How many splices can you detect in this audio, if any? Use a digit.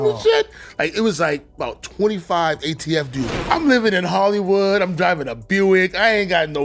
1